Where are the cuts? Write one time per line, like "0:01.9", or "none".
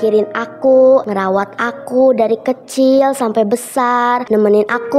0:01.0
0:04.2